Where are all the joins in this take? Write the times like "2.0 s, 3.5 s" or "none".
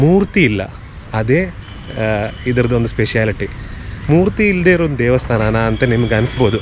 none